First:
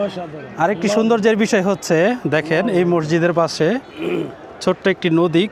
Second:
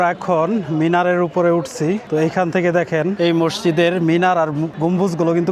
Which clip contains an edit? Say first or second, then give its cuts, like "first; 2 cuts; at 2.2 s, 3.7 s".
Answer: second; 3 cuts; at 2.0 s, 3.1 s, 4.7 s